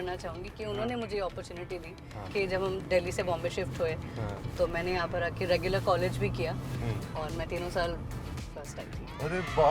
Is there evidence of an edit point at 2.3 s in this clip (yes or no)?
yes